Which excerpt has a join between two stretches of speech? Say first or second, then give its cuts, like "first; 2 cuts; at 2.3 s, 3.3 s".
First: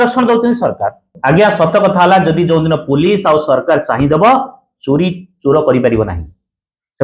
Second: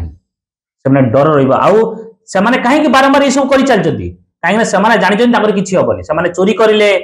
first; 1 cut; at 1.1 s